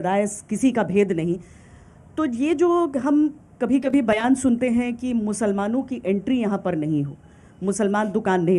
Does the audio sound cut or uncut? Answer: uncut